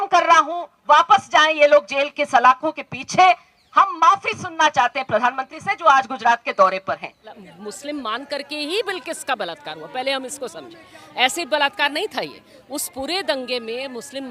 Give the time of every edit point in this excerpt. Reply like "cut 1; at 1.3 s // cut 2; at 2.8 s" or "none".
cut 1; at 7.4 s